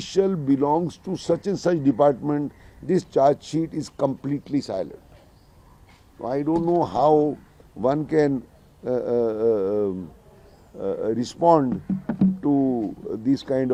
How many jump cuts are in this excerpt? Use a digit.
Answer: 0